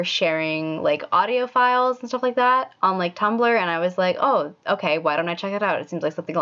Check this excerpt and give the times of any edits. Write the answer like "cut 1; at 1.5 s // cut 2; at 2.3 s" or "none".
none